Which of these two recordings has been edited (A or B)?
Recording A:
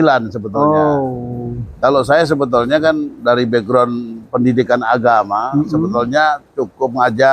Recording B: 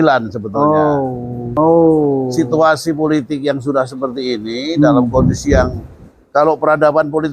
B